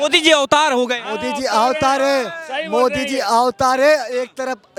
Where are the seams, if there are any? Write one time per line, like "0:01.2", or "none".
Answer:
none